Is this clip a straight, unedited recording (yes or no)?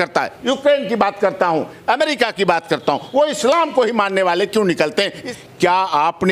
no